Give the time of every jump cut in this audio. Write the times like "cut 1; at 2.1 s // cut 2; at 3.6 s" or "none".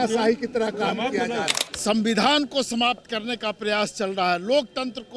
cut 1; at 1.6 s